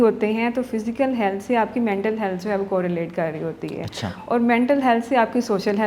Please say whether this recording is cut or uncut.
uncut